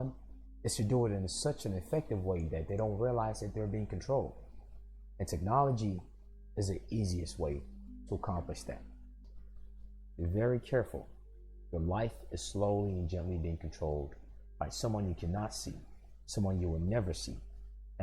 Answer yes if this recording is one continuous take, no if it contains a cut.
no